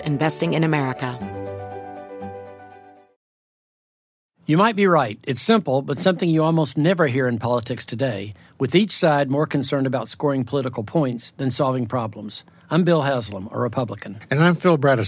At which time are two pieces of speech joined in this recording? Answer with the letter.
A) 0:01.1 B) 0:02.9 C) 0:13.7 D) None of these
A